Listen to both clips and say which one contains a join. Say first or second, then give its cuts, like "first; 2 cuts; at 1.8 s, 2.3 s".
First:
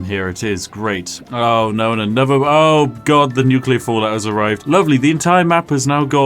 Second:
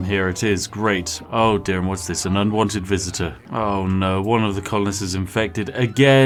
first; 1 cut; at 1.2 s